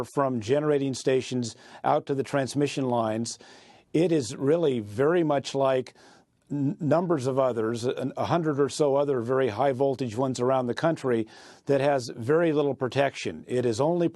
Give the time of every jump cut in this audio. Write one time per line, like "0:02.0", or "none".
0:09.4